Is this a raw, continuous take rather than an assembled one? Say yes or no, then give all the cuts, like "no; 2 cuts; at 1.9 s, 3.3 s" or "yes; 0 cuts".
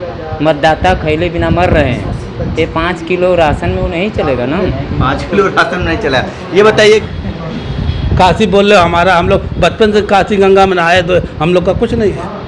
no; 1 cut; at 7.1 s